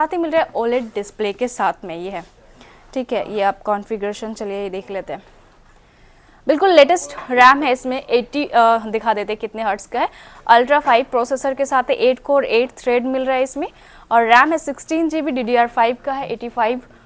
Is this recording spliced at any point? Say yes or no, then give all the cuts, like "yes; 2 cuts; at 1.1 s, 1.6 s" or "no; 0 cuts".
no; 0 cuts